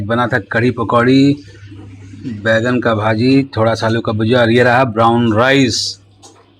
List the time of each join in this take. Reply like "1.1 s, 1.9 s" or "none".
none